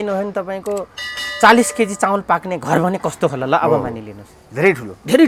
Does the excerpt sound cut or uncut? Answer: uncut